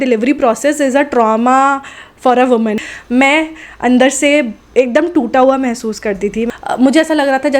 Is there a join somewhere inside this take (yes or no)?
yes